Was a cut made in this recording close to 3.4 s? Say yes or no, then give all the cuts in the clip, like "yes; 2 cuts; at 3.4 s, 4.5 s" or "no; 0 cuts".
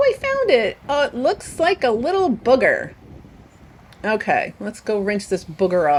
no; 0 cuts